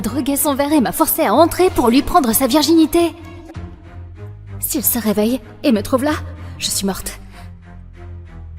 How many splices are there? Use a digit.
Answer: 1